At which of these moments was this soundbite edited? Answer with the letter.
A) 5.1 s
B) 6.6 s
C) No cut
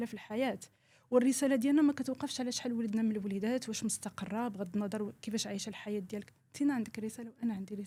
C